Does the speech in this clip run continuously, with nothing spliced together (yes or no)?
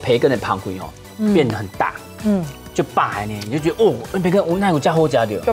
yes